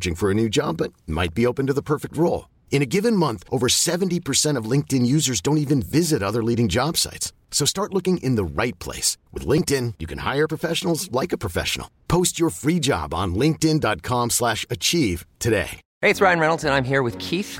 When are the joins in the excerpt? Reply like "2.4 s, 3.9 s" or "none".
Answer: 15.8 s